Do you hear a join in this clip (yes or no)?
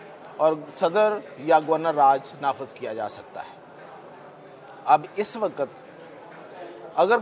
no